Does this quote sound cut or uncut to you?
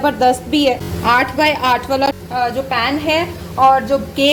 uncut